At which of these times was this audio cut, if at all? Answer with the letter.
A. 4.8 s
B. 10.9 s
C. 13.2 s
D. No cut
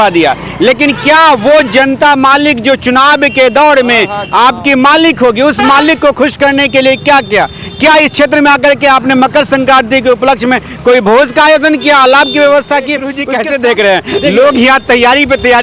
C